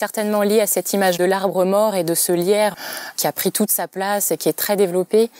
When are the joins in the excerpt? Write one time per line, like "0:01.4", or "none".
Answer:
0:01.2
0:02.7

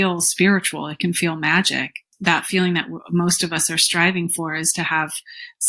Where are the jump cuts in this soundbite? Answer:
0:02.0

